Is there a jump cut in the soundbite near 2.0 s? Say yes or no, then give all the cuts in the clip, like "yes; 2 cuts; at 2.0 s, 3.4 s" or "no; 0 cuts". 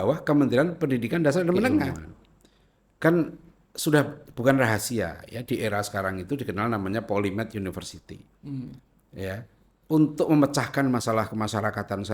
yes; 1 cut; at 2.0 s